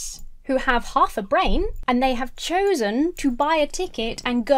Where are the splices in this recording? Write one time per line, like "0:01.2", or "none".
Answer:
0:01.8